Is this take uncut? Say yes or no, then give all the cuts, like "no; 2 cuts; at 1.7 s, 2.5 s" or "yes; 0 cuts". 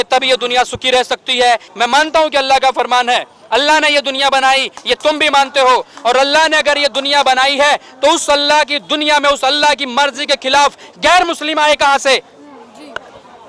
no; 1 cut; at 1.7 s